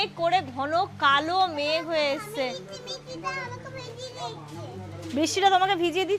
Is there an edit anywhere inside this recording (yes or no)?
no